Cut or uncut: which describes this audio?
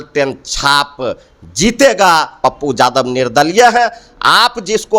cut